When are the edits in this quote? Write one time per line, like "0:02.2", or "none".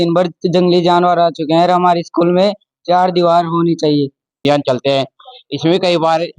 0:04.4